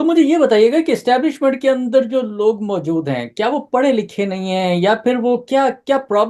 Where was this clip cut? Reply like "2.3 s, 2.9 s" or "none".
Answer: none

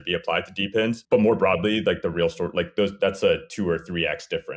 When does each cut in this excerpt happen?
1.0 s

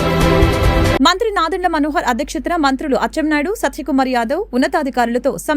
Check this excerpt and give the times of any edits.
0.9 s

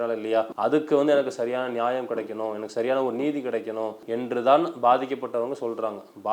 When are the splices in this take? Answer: 4.0 s

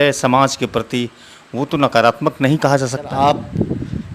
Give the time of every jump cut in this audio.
3.1 s

